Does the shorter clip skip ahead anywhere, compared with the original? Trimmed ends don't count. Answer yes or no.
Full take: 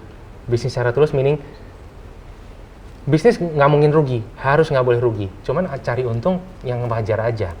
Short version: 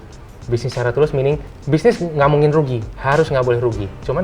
yes